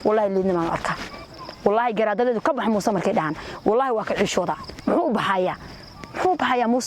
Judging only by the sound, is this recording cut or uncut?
uncut